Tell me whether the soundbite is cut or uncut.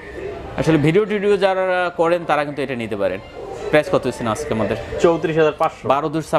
uncut